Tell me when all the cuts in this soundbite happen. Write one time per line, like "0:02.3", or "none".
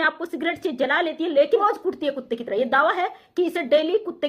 0:01.6